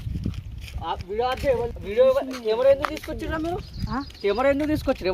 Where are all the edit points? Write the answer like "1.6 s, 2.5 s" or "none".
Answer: 1.8 s